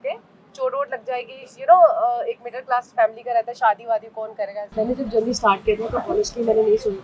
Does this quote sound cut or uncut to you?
cut